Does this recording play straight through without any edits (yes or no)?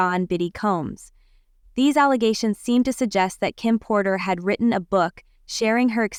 yes